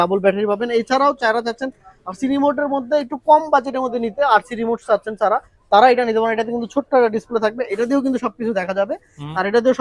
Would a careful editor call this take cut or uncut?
uncut